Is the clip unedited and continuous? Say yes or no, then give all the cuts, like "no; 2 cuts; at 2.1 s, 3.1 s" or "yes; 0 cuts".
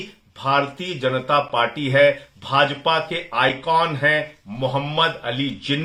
yes; 0 cuts